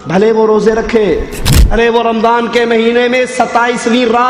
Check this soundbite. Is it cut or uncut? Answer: cut